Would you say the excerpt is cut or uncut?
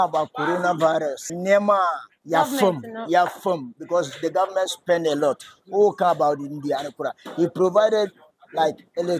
cut